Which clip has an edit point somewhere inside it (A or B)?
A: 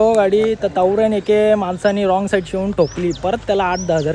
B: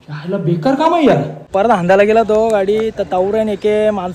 B